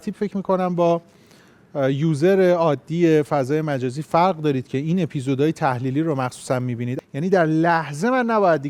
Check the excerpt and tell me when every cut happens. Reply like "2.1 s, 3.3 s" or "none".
6.9 s